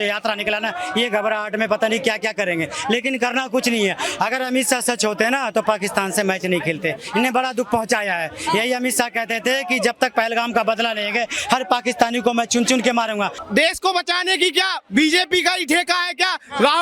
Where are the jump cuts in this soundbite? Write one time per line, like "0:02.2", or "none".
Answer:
0:13.4